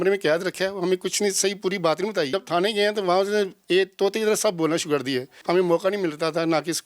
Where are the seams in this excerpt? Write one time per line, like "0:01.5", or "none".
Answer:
0:02.3
0:05.3